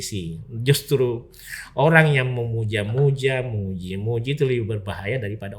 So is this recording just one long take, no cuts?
yes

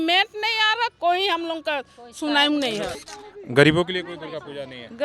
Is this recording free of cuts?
no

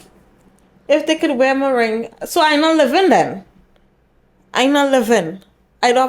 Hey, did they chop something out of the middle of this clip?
no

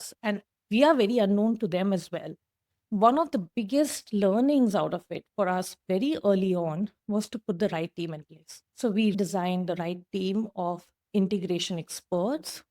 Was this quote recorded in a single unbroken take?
no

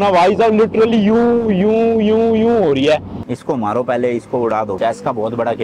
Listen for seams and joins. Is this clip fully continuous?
no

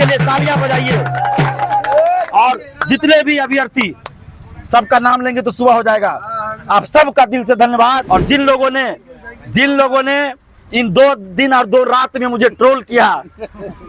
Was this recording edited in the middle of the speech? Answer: yes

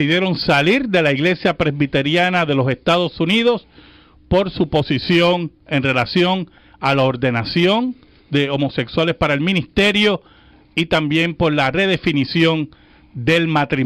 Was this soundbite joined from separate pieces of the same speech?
no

